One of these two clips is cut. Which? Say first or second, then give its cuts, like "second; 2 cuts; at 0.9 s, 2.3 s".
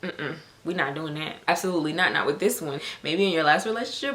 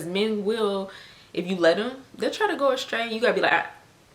first; 2 cuts; at 1.3 s, 2.8 s